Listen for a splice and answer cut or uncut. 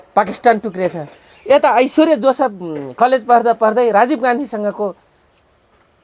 uncut